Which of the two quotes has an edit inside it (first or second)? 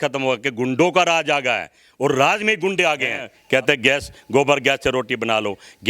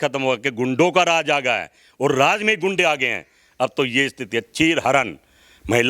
first